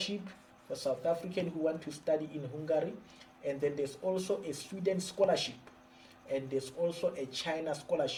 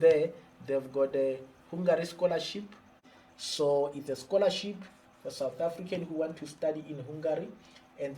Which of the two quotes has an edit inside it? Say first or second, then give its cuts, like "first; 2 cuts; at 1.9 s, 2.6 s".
second; 1 cut; at 3.1 s